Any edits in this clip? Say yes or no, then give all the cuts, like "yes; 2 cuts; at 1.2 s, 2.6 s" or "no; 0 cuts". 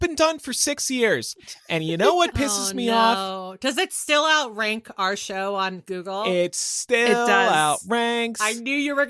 no; 0 cuts